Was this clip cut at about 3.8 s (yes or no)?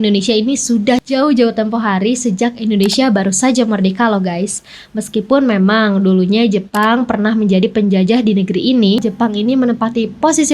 no